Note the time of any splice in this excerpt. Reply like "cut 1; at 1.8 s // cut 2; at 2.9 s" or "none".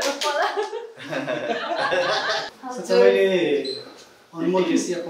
cut 1; at 2.4 s